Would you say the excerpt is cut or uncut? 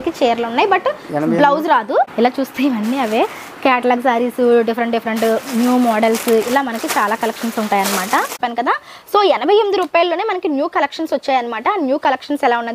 cut